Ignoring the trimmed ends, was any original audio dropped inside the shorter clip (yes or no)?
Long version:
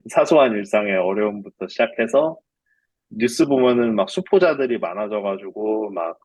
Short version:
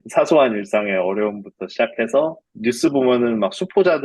yes